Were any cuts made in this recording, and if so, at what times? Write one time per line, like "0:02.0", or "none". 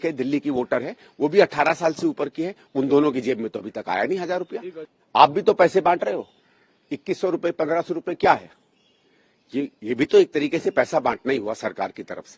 0:04.8